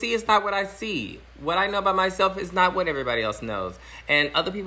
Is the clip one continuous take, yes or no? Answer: yes